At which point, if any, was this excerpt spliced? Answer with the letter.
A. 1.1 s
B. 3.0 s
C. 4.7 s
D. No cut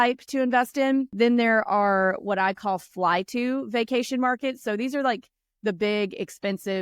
A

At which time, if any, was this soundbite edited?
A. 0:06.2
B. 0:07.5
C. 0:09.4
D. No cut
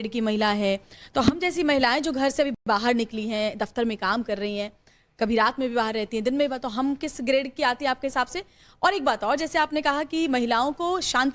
D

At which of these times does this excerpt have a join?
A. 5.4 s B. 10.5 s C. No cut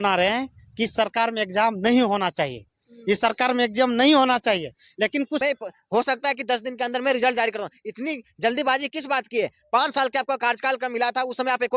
A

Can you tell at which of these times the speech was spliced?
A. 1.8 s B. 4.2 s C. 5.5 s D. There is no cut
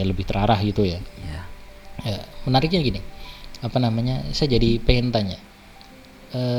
D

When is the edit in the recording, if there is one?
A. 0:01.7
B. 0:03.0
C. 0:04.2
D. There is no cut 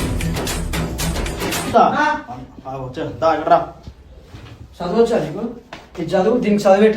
A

